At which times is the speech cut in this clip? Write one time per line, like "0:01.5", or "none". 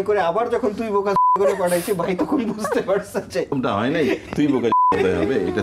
0:03.5